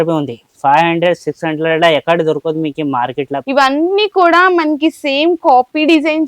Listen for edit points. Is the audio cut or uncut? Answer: cut